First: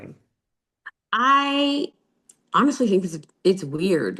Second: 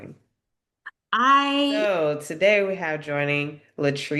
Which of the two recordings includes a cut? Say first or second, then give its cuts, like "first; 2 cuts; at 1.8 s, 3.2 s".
second; 1 cut; at 1.8 s